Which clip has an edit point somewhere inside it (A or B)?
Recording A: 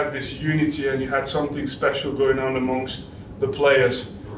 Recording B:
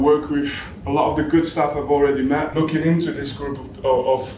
B